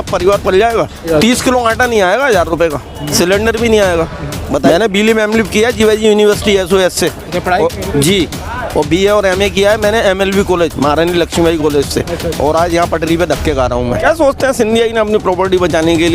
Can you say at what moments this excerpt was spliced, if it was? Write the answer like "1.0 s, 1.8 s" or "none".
1.0 s, 3.1 s, 4.6 s, 14.0 s